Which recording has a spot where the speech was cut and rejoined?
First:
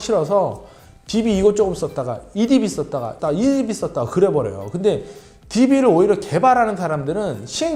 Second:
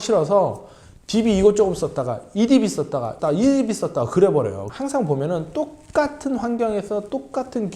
second; 1 cut; at 4.6 s

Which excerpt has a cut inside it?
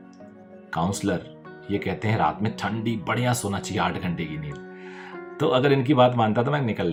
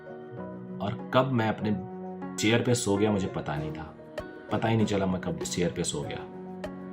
second; 1 cut; at 2.3 s

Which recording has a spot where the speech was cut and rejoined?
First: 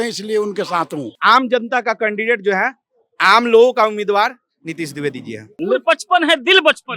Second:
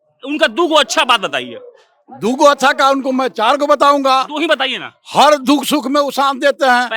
first; 2 cuts; at 1.1 s, 5.4 s

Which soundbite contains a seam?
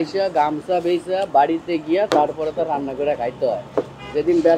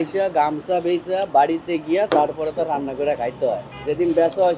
second; 1 cut; at 3.7 s

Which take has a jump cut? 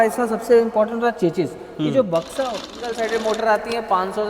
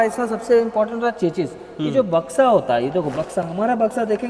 first; 1 cut; at 2.8 s

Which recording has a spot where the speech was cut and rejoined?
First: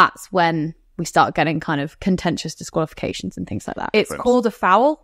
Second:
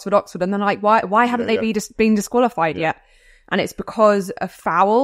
first; 1 cut; at 3.9 s

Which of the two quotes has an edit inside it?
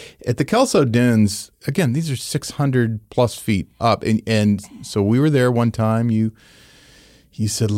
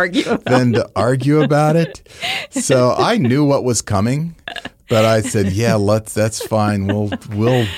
first; 2 cuts; at 1.5 s, 3.7 s

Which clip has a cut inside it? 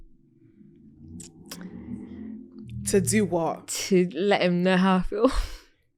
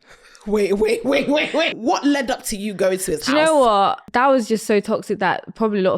second; 2 cuts; at 1.8 s, 4.0 s

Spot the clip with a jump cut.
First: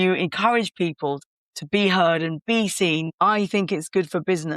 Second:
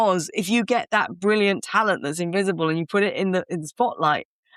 first; 2 cuts; at 1.2 s, 3.1 s

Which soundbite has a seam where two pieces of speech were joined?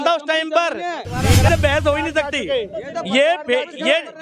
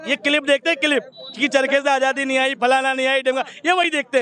first; 1 cut; at 1.5 s

